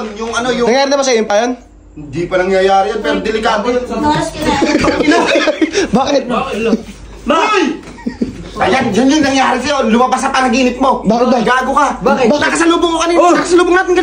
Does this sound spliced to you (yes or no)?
no